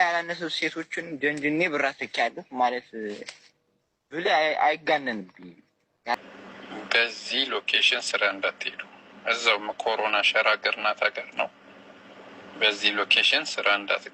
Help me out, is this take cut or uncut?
cut